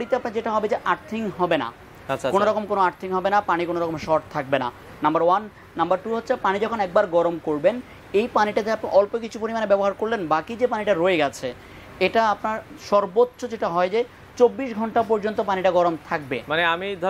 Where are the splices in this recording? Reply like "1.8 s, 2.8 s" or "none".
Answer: none